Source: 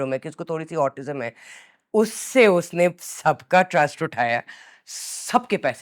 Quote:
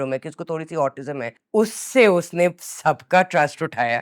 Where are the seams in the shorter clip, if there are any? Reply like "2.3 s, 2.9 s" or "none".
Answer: 1.3 s